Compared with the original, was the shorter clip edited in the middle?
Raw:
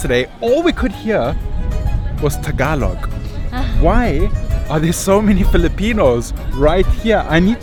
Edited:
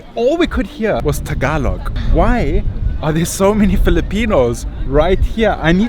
yes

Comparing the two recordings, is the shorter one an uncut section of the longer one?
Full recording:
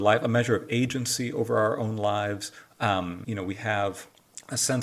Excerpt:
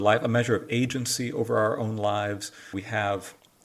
no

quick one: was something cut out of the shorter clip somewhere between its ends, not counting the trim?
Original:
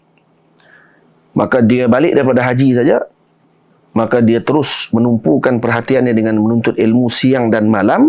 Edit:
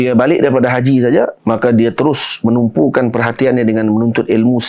yes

